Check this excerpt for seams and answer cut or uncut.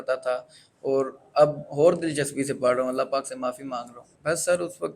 cut